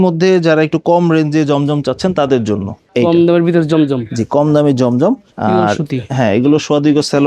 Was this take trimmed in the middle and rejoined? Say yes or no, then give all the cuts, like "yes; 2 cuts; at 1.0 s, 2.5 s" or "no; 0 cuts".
no; 0 cuts